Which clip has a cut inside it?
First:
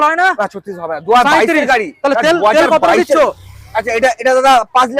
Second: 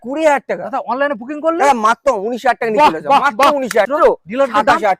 second; 1 cut; at 3.9 s

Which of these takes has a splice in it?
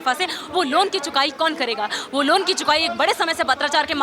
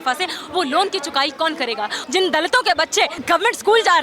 second; 2 cuts; at 2.0 s, 3.2 s

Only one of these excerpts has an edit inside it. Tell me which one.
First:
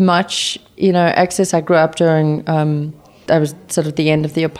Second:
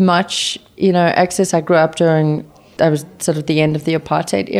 second; 1 cut; at 2.4 s

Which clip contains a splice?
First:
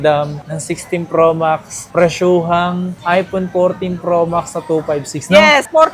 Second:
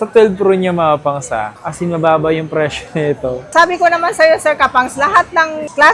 second; 2 cuts; at 1.6 s, 3.4 s

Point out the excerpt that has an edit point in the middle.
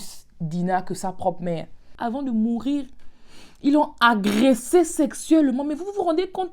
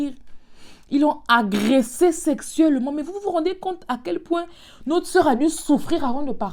first; 1 cut; at 1.8 s

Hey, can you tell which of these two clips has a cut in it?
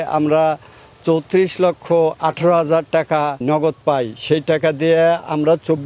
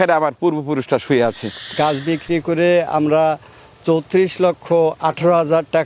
second; 1 cut; at 1.7 s

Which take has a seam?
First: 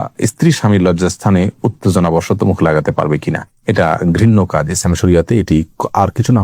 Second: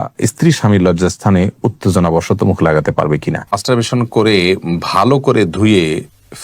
second; 1 cut; at 3.6 s

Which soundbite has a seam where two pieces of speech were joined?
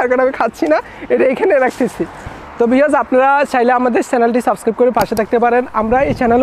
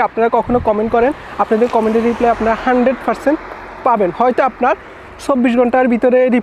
first; 1 cut; at 2.5 s

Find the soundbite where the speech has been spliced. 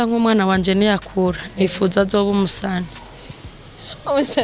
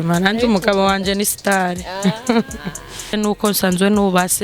second; 1 cut; at 3.1 s

